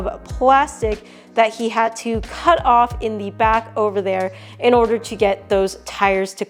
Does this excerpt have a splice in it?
no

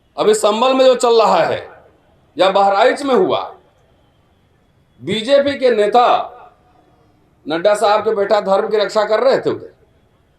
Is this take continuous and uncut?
yes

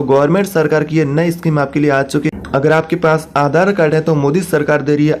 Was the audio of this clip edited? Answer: yes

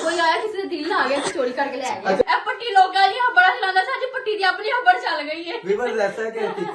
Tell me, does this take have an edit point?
yes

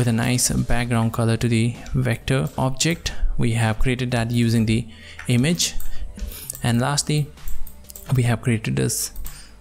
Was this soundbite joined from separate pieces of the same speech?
yes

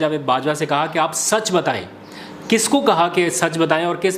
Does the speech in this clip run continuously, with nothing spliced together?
yes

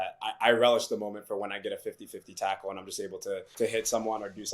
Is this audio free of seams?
no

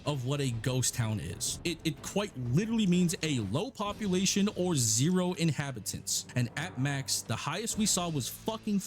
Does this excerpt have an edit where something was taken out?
yes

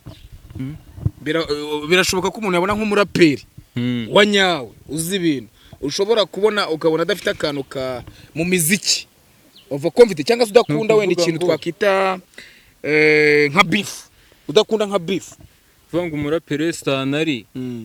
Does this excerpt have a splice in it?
no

